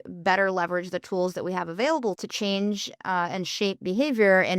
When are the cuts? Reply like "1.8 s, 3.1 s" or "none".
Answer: 2.2 s